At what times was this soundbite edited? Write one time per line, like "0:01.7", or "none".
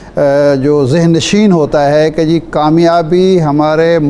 none